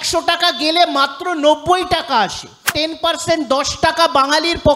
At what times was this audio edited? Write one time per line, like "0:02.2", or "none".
0:02.7